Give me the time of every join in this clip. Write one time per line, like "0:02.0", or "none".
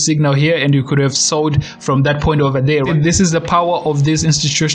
0:02.9

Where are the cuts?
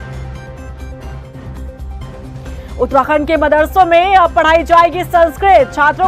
0:01.1

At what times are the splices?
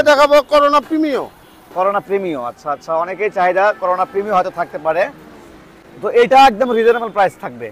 none

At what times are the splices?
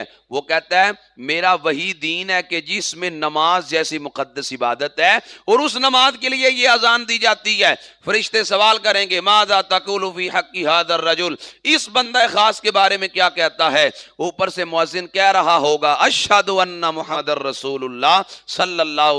0:17.1

